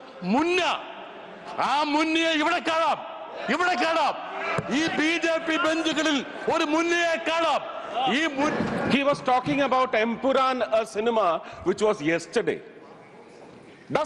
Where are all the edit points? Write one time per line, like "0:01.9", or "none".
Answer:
0:08.5